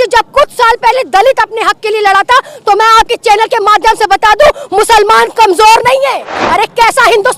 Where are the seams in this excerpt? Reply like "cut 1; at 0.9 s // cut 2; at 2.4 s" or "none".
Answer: cut 1; at 6.4 s